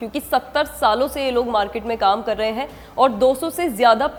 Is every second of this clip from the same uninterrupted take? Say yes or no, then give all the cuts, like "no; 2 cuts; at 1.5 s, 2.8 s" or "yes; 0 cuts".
yes; 0 cuts